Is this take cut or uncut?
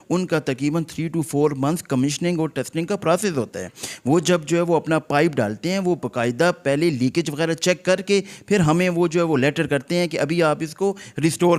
uncut